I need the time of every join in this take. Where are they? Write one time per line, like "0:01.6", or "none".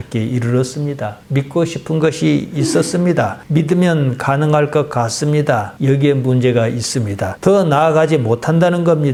none